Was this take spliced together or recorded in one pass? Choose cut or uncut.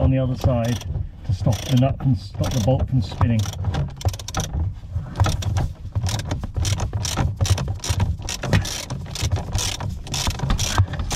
uncut